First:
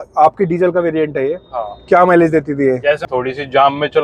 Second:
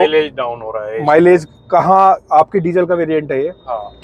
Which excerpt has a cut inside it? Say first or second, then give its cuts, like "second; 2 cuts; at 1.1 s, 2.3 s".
first; 1 cut; at 3.0 s